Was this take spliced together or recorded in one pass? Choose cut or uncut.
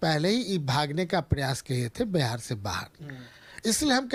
uncut